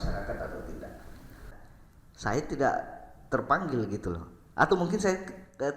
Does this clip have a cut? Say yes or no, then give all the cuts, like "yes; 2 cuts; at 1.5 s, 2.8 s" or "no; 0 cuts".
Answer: yes; 1 cut; at 1.6 s